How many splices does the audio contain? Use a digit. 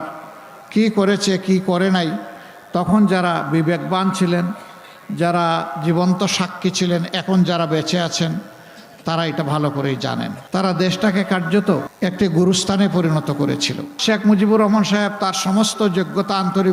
2